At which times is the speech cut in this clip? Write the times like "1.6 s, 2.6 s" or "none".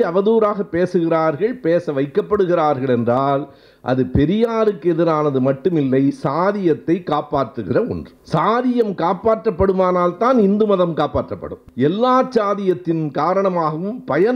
8.1 s, 11.6 s